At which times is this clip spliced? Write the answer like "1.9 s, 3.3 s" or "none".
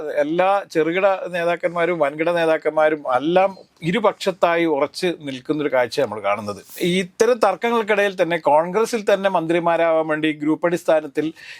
6.7 s

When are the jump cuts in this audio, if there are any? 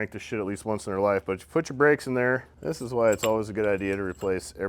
2.6 s

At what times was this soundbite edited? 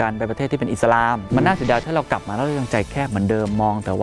1.2 s

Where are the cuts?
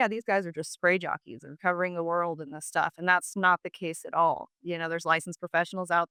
none

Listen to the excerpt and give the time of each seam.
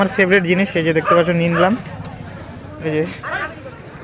none

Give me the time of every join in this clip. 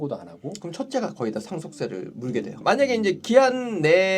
2.6 s

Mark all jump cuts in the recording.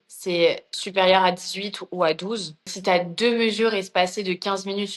2.7 s

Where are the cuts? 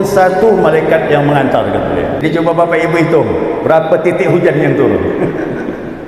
2.2 s

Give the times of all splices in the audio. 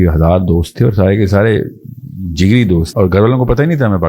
2.9 s

